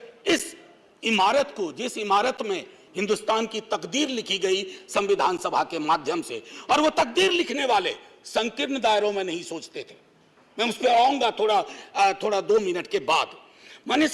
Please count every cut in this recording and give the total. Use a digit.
0